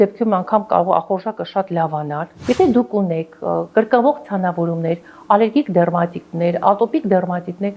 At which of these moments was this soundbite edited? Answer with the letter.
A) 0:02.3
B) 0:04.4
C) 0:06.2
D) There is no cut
A